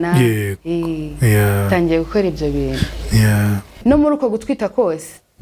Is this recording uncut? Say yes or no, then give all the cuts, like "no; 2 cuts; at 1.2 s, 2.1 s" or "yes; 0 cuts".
no; 1 cut; at 3.7 s